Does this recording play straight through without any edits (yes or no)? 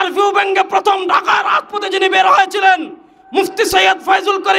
yes